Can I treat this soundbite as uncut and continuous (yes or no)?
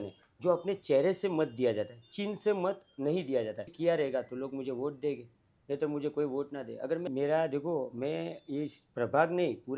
no